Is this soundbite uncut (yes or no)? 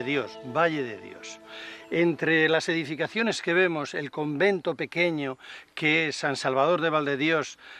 no